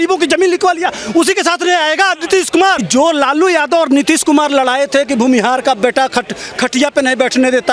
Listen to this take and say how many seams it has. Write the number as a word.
one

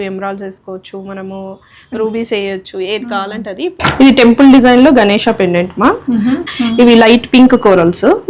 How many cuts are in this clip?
two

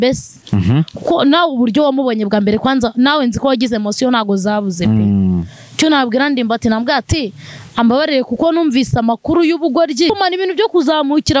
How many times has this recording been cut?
one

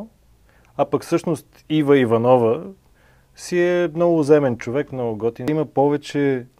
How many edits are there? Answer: one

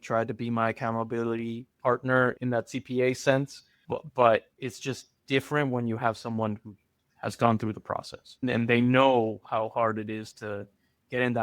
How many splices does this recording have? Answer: two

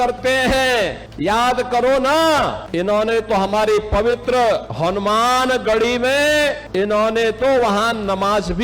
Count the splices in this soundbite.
four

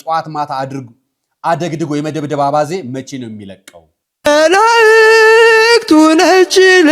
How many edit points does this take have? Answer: one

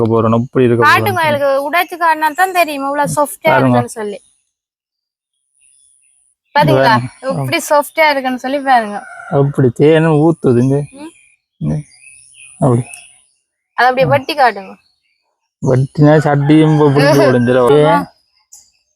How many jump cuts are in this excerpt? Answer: one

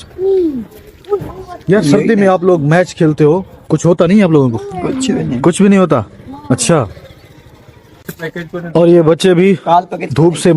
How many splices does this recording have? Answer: zero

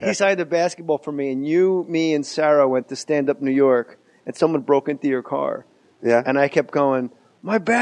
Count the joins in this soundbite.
zero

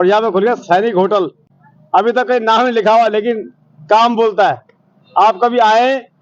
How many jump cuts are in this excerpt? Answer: zero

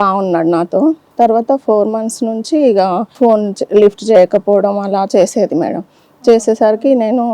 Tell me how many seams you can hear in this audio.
two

